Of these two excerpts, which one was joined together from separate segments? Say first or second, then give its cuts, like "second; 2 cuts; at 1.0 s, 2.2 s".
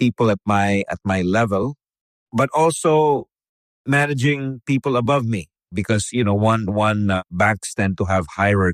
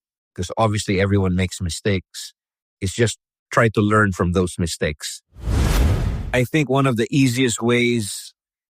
second; 1 cut; at 5.7 s